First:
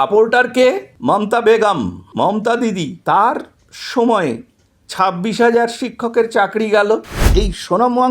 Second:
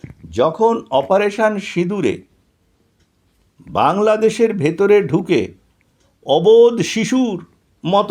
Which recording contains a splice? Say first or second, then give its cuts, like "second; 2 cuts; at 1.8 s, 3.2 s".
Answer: first; 4 cuts; at 0.9 s, 2.0 s, 3.0 s, 7.3 s